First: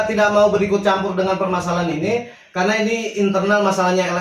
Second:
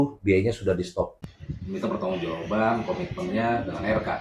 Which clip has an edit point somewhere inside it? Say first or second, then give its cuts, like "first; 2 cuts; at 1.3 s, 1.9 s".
second; 1 cut; at 1.0 s